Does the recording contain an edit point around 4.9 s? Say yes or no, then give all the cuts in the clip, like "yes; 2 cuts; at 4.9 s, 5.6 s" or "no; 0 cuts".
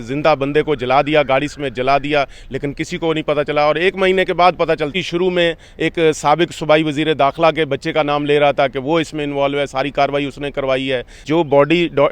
yes; 2 cuts; at 4.9 s, 11.1 s